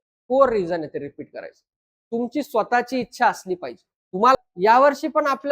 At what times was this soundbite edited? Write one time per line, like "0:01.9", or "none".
0:04.3